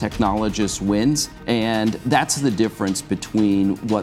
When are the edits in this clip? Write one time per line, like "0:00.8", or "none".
0:01.3